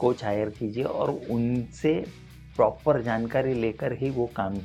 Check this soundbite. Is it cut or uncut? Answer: uncut